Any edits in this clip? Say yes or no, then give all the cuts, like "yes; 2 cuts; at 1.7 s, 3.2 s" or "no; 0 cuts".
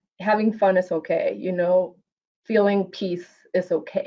no; 0 cuts